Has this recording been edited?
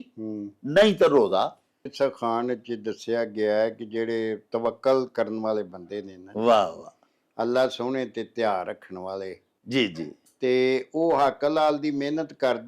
yes; 1 cut; at 1.9 s

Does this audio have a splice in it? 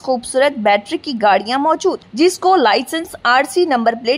no; 0 cuts

